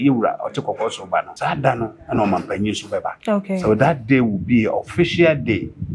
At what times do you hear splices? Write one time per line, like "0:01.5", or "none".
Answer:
0:01.3
0:03.1